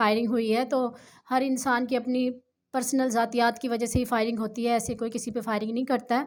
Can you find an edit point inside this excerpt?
no; 0 cuts

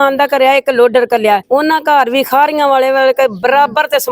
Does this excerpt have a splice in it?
yes; 1 cut; at 1.4 s

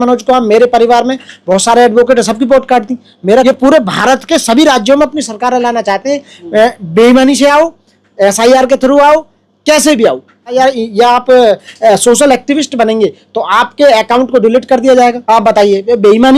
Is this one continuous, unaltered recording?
no; 3 cuts; at 3.4 s, 10.5 s, 15.3 s

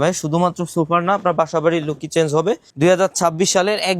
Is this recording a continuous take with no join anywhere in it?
no; 1 cut; at 2.7 s

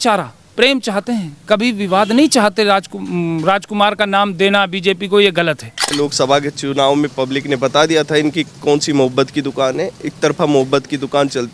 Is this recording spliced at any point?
yes; 1 cut; at 6.0 s

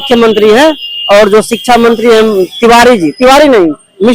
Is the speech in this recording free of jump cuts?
yes; 0 cuts

